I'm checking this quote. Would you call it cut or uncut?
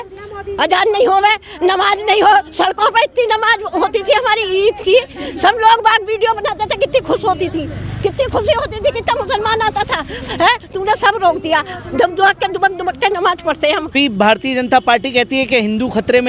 cut